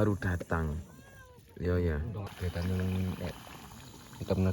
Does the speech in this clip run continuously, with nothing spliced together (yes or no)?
no